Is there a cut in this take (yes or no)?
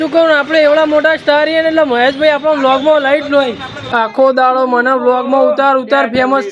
yes